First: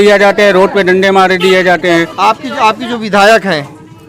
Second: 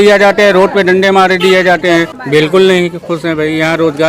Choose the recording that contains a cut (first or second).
second